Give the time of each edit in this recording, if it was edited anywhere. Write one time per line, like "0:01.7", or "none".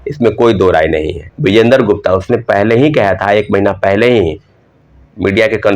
0:01.2